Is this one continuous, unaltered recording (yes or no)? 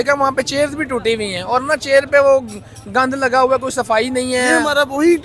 yes